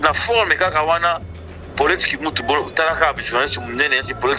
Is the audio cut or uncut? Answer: uncut